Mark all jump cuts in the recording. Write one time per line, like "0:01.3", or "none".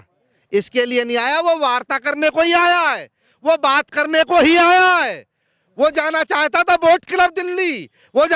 none